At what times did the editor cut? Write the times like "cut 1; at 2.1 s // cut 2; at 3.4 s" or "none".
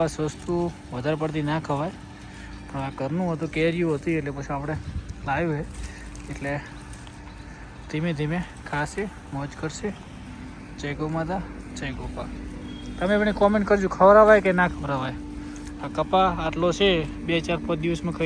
none